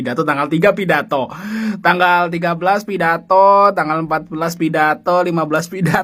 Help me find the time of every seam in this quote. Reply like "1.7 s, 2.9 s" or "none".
none